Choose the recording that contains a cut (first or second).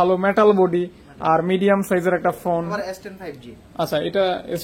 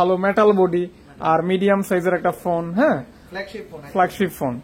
first